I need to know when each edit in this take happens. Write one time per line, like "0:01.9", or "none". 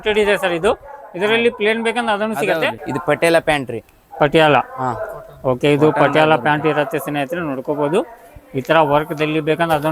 0:02.8

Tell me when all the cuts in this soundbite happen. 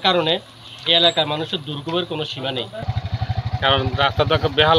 0:02.9

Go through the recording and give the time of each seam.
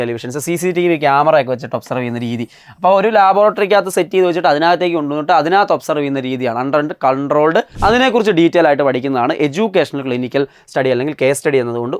0:07.7

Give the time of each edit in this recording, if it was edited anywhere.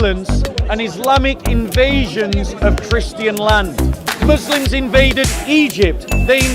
0:04.1

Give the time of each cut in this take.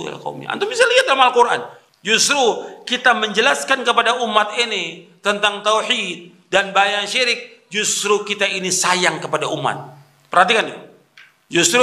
0:01.8

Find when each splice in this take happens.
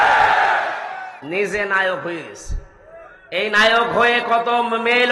0:01.2

